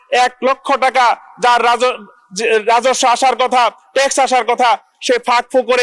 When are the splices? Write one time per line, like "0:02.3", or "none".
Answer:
none